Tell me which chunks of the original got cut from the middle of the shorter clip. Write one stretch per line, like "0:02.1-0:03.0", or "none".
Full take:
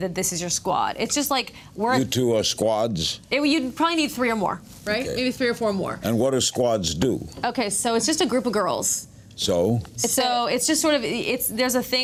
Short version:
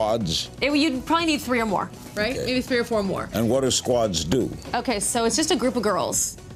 none